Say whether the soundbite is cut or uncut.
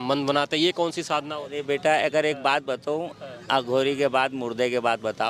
uncut